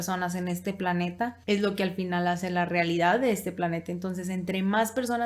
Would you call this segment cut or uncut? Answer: cut